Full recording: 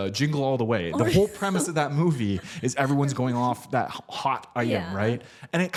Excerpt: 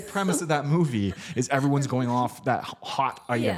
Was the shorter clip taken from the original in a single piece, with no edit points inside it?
yes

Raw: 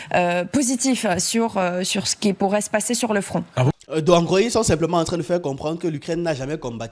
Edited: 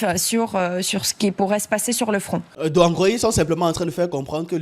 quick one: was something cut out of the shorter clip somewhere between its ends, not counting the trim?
yes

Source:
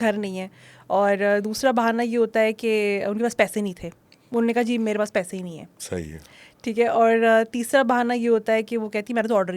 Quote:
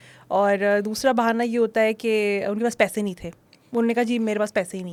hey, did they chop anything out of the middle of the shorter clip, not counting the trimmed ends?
no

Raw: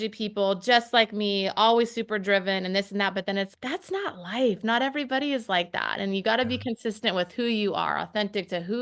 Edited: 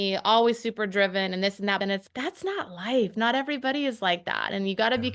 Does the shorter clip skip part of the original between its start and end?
yes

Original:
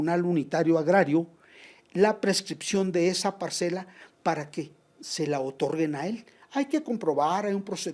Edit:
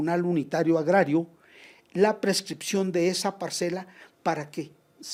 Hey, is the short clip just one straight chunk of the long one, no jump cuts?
yes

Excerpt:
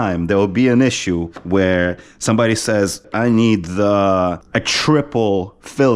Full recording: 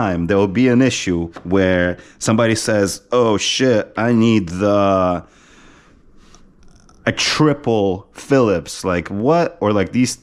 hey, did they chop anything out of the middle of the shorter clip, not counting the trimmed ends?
yes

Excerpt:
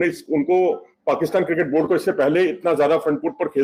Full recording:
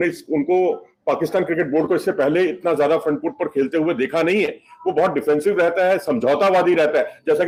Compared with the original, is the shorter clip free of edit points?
yes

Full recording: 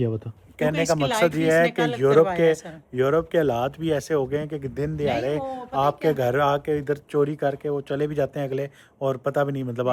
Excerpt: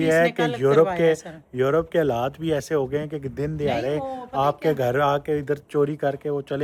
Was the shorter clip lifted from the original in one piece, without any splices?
yes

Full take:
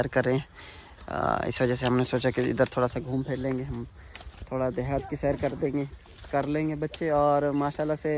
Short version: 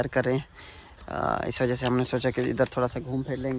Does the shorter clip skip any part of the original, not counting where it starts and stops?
no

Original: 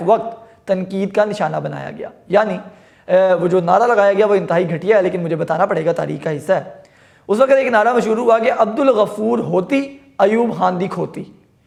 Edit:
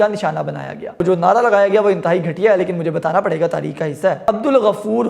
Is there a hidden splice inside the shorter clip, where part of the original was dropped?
yes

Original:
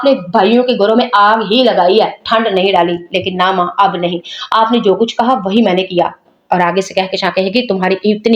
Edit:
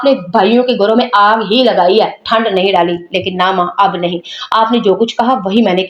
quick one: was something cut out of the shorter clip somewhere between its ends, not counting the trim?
no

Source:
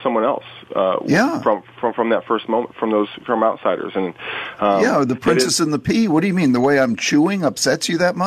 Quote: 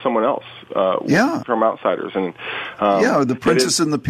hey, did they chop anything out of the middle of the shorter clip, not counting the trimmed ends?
yes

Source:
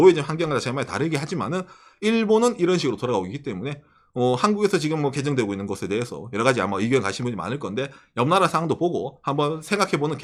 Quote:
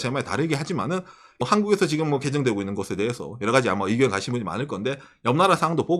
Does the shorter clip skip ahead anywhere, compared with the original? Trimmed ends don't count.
yes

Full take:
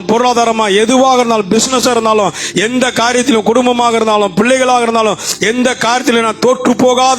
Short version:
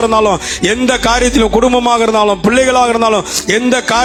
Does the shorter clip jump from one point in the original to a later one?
no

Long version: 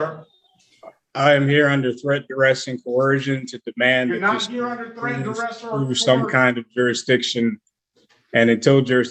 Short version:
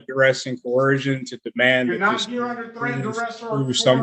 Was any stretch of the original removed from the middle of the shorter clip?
no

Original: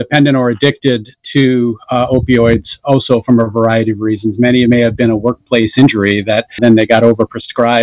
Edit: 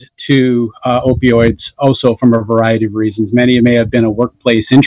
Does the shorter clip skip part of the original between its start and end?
no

